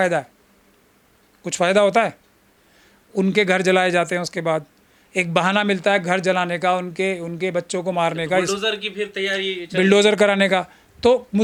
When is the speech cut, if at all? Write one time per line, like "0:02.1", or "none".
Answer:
none